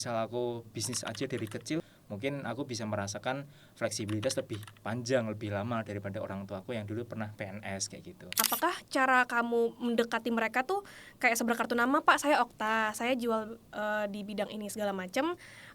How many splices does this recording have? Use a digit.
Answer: 2